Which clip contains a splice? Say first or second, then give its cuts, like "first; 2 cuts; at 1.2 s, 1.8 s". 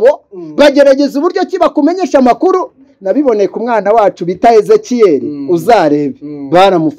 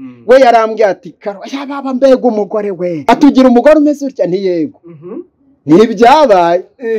second; 1 cut; at 3.0 s